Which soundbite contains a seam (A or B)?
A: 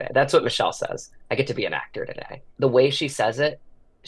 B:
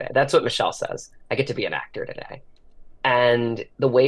A